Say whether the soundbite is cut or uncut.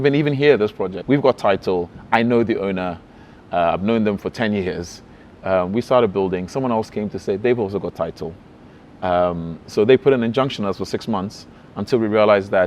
cut